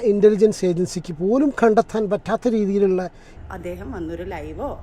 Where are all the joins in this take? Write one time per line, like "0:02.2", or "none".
0:03.2